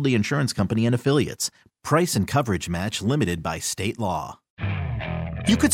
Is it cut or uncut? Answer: cut